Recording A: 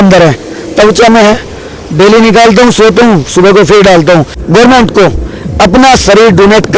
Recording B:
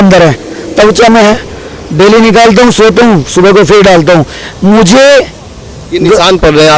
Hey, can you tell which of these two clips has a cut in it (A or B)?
A